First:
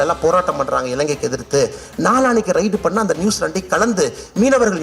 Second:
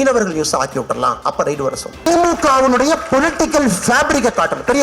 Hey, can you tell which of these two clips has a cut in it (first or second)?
second